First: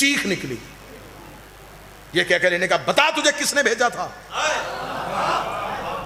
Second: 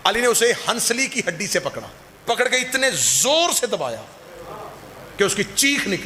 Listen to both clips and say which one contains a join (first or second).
second